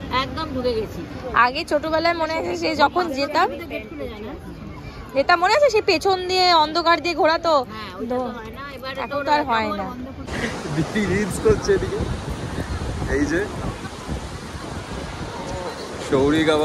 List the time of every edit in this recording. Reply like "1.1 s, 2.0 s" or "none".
10.2 s